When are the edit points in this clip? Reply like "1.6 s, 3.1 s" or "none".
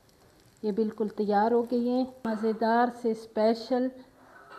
2.3 s